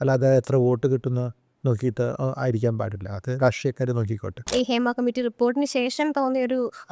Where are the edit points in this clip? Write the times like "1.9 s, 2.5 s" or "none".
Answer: 4.4 s